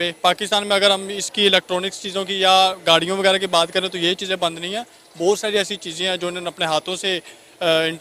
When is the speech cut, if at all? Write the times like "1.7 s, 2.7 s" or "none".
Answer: none